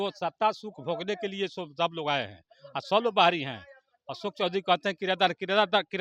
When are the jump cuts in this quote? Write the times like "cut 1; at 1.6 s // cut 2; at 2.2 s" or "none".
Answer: none